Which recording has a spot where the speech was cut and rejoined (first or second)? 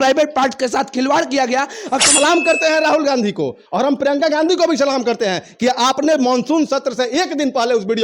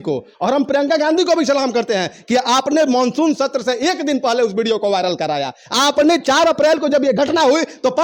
first